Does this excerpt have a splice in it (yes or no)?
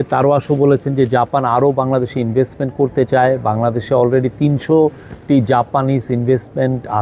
no